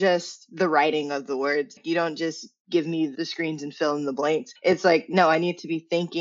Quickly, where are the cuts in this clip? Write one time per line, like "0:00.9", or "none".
0:01.8
0:04.5